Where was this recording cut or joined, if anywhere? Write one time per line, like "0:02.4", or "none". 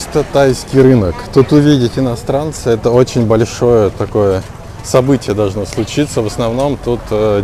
none

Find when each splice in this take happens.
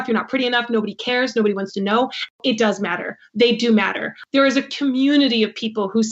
0:02.3
0:04.1

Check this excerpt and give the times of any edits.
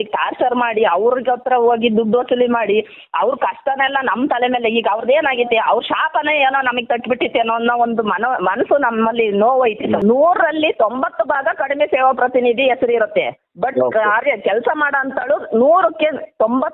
0:10.0

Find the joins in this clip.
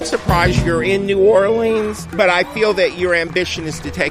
0:02.0

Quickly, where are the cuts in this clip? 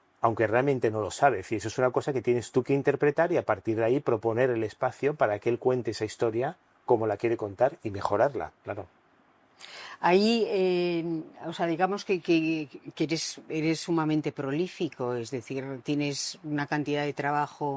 none

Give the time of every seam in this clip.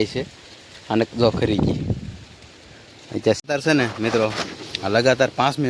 0:03.4

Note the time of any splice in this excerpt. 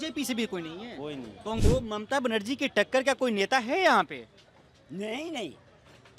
0:01.6

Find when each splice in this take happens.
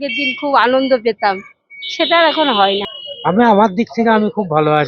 0:03.0

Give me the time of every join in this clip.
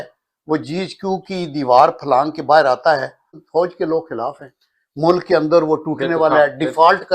0:03.4

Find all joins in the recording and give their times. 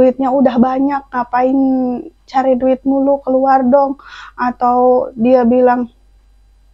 none

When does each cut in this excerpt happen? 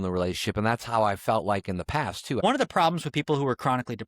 0:02.4

